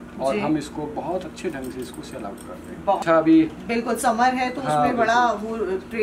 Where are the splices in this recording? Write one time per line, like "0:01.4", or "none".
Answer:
0:03.0